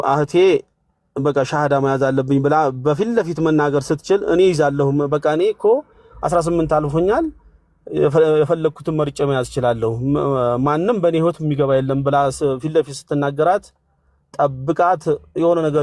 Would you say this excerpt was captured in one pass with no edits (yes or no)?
yes